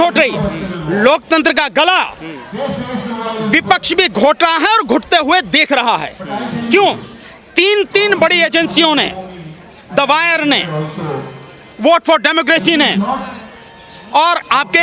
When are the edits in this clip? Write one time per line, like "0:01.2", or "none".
none